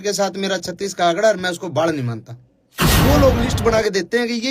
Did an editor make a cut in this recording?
yes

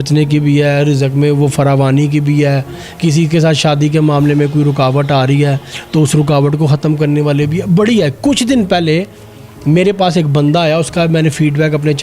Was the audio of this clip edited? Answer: no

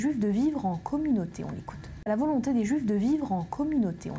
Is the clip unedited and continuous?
yes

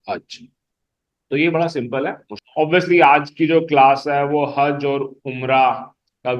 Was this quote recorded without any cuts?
no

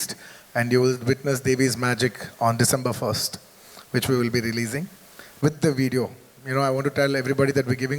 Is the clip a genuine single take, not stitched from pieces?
yes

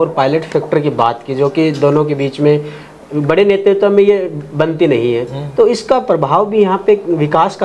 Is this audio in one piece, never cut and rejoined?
yes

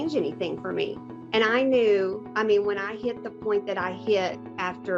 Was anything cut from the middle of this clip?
no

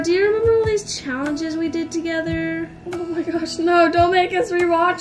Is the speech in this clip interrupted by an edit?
no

